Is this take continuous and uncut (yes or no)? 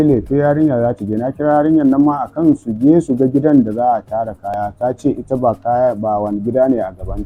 yes